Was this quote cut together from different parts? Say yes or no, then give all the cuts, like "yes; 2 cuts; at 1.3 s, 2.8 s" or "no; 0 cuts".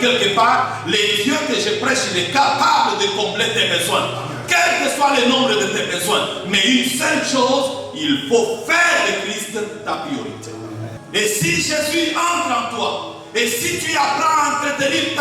yes; 1 cut; at 10.9 s